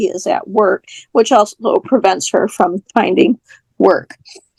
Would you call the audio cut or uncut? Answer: uncut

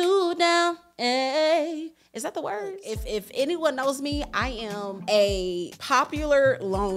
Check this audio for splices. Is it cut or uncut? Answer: cut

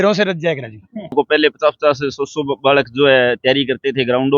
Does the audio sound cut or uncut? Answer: cut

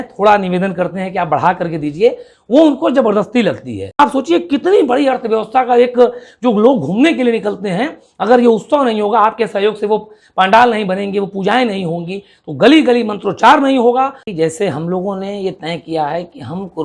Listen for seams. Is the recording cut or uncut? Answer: cut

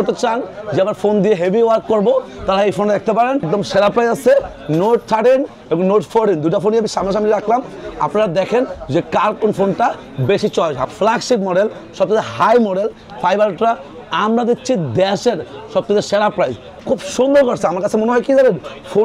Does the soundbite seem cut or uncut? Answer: cut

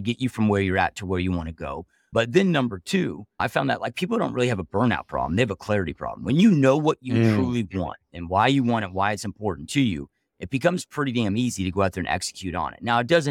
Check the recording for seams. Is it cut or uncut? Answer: uncut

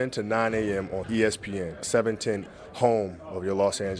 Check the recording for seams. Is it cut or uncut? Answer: uncut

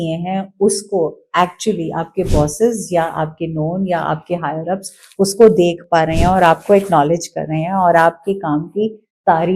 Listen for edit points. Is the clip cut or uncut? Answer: uncut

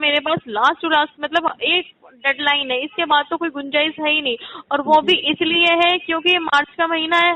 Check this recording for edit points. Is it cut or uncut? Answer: uncut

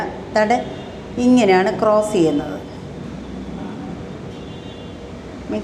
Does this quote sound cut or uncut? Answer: uncut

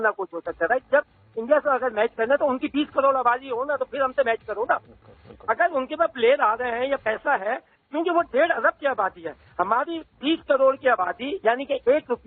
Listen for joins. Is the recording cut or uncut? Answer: uncut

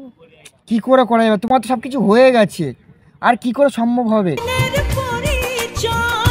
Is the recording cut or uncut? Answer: uncut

